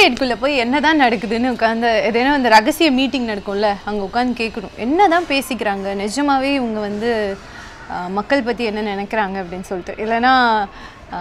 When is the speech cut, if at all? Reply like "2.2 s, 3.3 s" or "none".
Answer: none